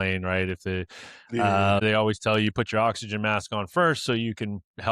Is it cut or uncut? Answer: cut